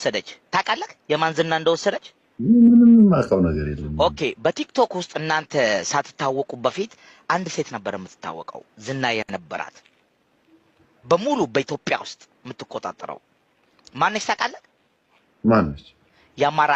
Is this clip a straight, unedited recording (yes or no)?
yes